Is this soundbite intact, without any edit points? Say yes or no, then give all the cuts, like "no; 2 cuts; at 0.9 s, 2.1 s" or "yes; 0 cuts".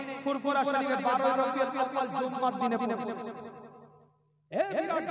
yes; 0 cuts